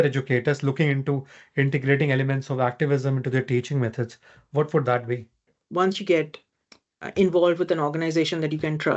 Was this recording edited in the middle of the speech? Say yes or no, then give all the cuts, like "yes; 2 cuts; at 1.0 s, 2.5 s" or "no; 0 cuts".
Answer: yes; 1 cut; at 5.6 s